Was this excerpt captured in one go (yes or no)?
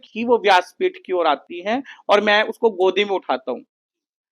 yes